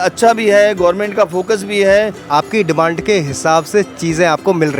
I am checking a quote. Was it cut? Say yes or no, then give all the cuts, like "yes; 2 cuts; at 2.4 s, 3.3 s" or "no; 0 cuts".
yes; 1 cut; at 2.3 s